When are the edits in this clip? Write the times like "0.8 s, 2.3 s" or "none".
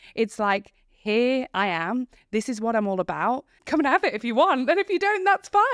3.5 s

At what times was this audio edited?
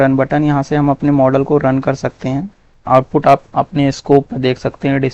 2.6 s

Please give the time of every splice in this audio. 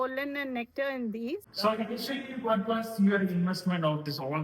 1.5 s

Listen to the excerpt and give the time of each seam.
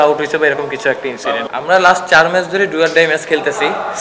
1.4 s

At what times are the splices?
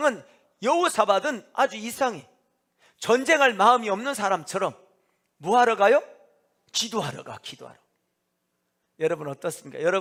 none

